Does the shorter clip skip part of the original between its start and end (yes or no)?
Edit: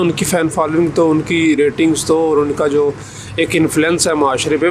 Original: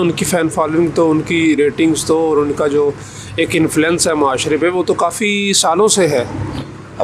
no